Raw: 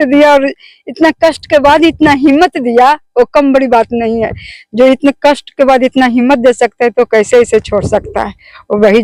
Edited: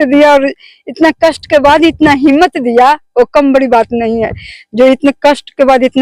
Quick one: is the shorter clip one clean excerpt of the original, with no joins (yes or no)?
yes